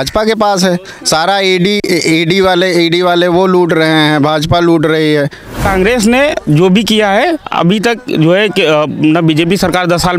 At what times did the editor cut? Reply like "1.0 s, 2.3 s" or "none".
5.6 s